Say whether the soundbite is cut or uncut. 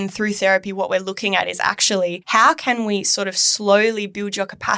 cut